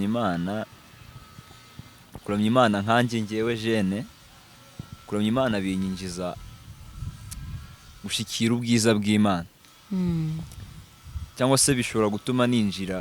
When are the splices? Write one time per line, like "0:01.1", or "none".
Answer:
none